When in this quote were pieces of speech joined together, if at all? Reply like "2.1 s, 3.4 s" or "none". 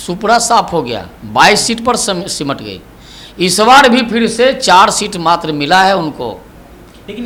none